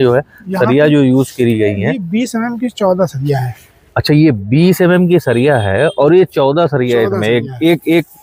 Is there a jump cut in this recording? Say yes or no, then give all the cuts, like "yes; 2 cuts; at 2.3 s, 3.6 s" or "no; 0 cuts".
no; 0 cuts